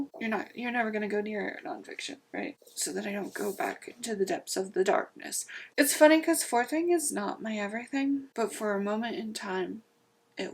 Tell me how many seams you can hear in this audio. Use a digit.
2